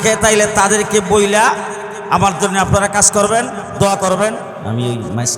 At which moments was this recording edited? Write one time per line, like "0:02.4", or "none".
0:04.5